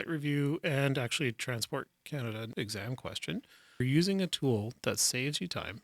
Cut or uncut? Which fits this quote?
cut